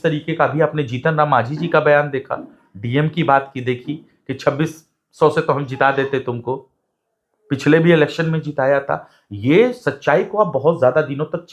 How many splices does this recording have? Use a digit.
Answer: 0